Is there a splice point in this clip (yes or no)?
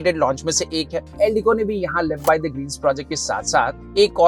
yes